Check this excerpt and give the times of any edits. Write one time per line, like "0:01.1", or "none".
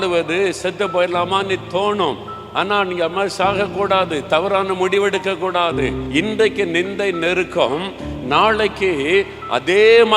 0:06.0